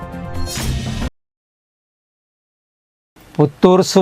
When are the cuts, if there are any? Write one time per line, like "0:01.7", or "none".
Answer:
none